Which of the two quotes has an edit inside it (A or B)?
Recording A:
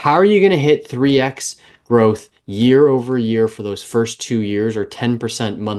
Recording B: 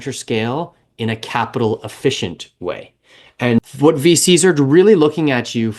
B